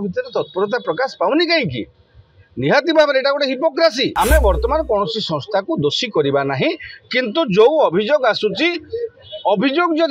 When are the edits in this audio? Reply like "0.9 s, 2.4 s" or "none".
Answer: 4.1 s